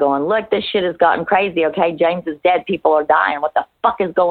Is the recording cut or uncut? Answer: uncut